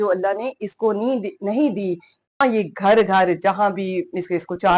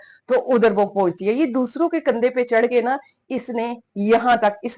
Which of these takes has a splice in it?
first; 1 cut; at 2.4 s

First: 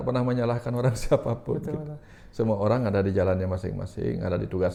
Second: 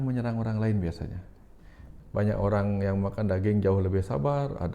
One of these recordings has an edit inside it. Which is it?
second; 1 cut; at 1.9 s

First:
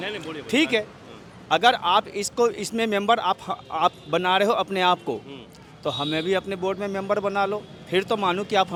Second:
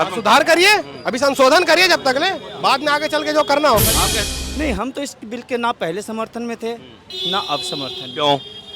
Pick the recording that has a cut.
second; 1 cut; at 4.2 s

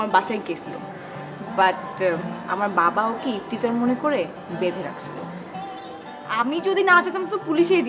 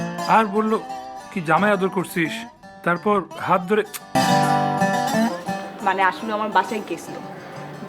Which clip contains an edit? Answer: second; 1 cut; at 4.2 s

